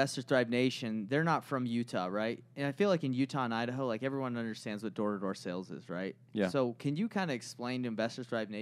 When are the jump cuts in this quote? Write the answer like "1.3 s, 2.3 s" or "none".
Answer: none